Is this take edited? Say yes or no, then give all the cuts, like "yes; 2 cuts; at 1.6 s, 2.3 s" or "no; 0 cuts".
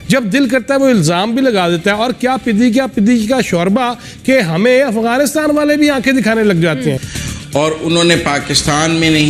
yes; 1 cut; at 7.1 s